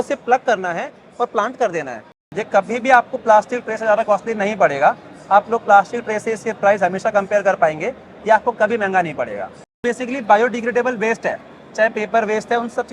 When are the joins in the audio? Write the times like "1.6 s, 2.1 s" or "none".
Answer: 2.3 s, 9.8 s